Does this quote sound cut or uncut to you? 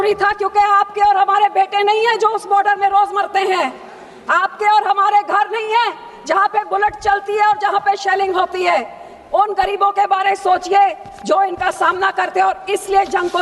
uncut